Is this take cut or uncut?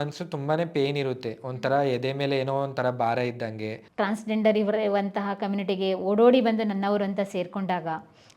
cut